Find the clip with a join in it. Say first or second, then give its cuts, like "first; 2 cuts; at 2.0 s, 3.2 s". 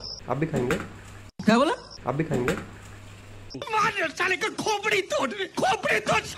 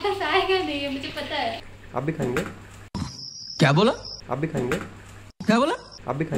second; 1 cut; at 1.7 s